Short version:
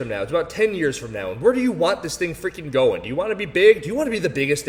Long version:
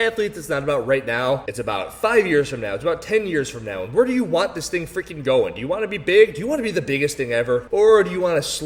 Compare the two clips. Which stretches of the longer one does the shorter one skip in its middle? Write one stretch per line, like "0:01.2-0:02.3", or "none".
none